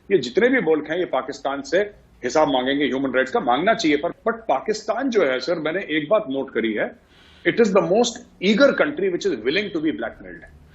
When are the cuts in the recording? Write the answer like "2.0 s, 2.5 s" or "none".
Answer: 4.1 s